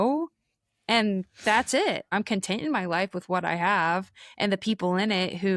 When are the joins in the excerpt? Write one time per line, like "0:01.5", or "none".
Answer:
0:02.1